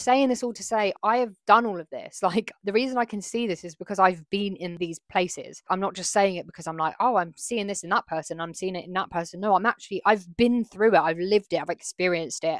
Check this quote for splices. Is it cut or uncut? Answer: uncut